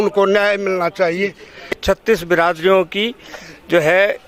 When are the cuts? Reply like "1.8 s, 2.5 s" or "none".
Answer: 2.0 s